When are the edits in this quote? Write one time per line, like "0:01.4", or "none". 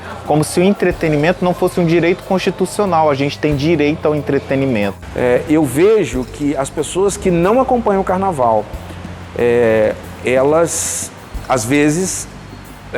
0:05.0

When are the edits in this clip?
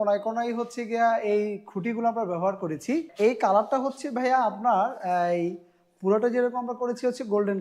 0:03.1

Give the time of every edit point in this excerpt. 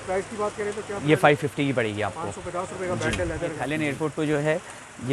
0:03.6

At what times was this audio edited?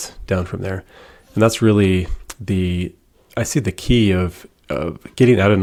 none

